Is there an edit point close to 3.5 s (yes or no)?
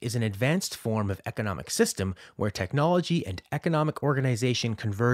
no